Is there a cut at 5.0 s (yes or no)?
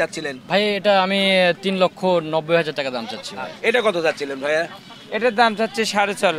no